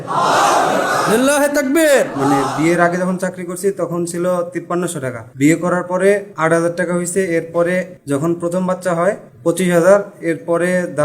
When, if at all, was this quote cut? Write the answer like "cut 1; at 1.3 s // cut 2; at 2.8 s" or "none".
cut 1; at 1.9 s // cut 2; at 4.8 s // cut 3; at 6.3 s // cut 4; at 8.0 s // cut 5; at 9.3 s